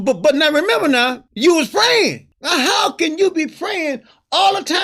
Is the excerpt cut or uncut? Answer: cut